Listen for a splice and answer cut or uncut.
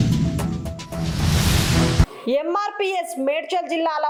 uncut